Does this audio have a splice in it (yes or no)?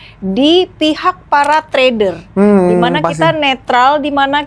no